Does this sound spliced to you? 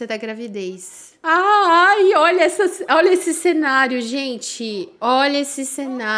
no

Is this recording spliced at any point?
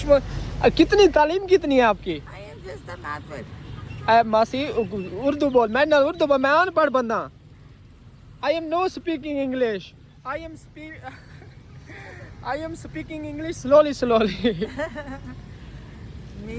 no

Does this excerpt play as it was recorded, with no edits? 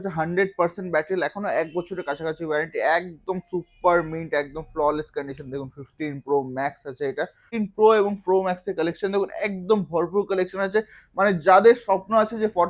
no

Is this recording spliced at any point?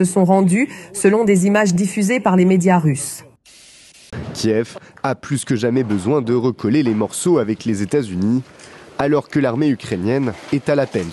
yes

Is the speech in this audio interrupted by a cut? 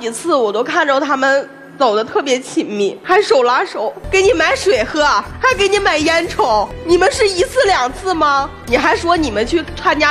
yes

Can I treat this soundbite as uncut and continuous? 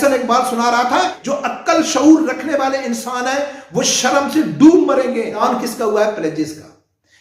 no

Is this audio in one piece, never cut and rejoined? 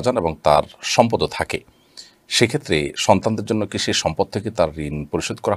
yes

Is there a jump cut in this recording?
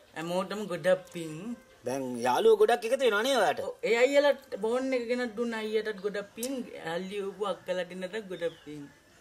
no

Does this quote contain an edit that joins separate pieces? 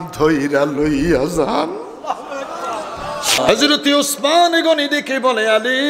yes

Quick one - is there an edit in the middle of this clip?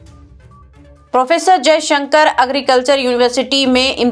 yes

